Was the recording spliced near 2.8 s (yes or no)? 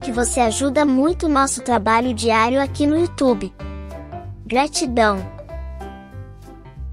no